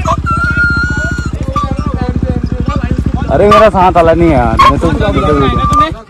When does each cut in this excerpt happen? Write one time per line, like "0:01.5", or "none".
0:03.2

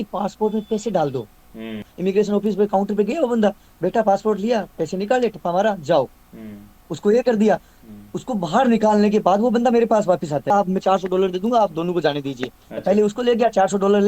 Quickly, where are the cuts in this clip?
0:01.9
0:10.5

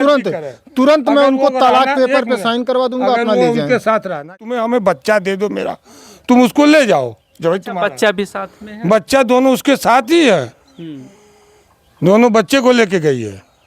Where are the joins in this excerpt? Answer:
0:04.4

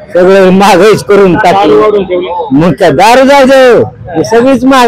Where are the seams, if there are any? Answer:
none

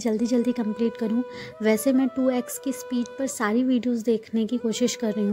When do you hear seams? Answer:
none

